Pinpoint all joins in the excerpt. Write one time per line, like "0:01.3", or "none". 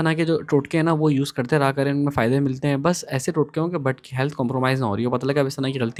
none